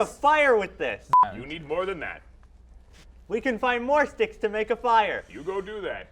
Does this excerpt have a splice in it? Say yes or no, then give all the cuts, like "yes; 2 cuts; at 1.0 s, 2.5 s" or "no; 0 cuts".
yes; 1 cut; at 1.1 s